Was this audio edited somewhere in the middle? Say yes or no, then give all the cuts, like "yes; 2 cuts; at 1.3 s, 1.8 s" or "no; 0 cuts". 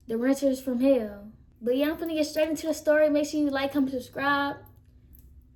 no; 0 cuts